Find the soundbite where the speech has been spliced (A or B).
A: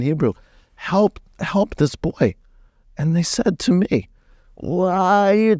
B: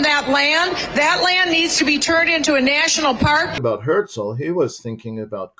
B